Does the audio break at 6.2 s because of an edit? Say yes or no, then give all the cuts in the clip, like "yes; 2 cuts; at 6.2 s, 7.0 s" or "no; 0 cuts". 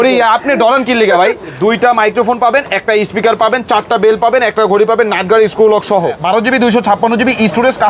yes; 2 cuts; at 1.6 s, 6.2 s